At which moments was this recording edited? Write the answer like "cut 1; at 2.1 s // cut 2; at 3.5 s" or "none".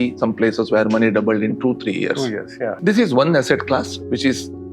cut 1; at 2.8 s